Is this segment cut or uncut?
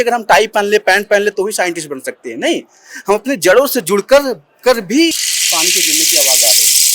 cut